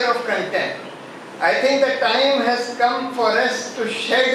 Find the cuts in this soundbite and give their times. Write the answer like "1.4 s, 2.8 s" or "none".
none